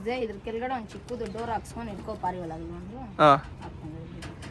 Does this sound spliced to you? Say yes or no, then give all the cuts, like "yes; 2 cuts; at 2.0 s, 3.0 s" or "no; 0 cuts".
no; 0 cuts